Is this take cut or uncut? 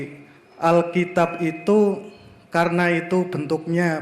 uncut